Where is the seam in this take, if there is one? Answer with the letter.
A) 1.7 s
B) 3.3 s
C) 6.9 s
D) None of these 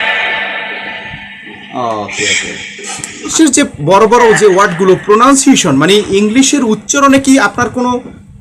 B